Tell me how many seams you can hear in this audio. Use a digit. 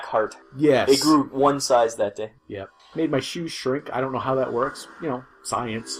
0